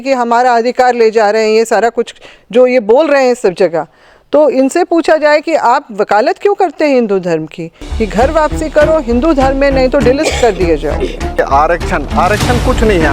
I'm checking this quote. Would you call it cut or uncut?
cut